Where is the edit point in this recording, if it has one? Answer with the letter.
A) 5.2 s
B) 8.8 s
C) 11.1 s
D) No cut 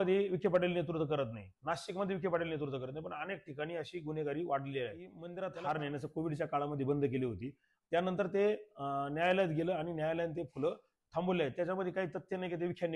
A